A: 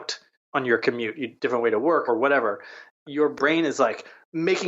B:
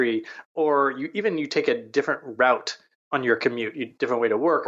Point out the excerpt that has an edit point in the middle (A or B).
A